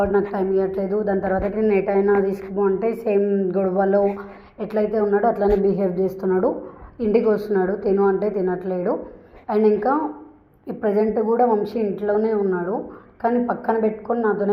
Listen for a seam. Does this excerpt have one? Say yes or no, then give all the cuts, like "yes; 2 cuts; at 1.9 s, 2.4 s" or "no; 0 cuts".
no; 0 cuts